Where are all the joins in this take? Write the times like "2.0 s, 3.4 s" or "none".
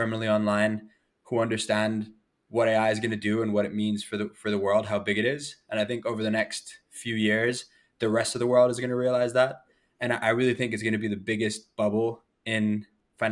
none